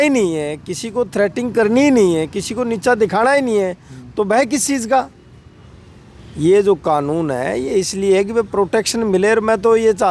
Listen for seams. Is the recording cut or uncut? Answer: uncut